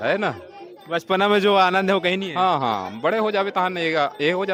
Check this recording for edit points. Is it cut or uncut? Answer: uncut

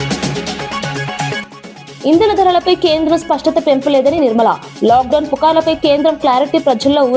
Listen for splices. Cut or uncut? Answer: cut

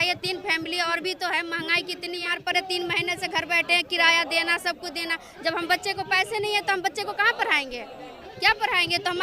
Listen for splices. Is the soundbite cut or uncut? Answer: cut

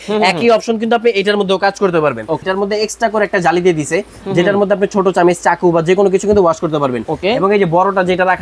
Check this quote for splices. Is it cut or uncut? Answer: cut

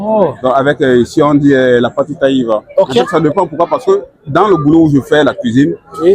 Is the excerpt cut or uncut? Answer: cut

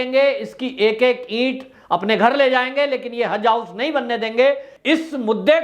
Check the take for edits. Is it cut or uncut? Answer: cut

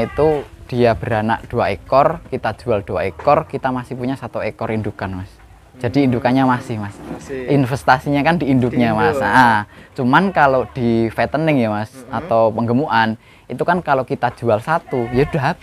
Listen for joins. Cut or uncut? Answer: uncut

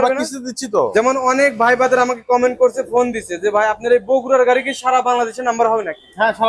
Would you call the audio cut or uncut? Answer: cut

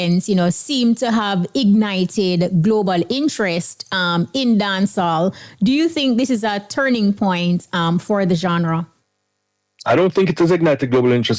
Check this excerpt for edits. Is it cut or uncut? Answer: uncut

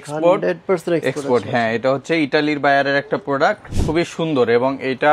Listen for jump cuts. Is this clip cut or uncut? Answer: cut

